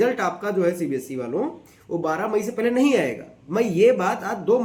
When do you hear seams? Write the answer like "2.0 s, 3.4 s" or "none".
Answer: none